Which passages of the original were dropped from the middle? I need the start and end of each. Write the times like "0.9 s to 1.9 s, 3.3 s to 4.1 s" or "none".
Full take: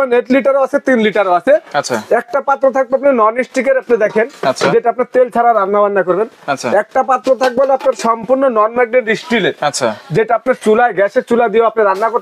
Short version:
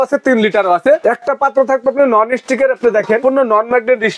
1.6 s to 2.1 s, 4.3 s to 8.3 s